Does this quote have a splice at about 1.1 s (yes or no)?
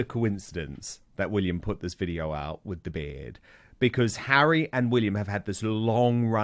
yes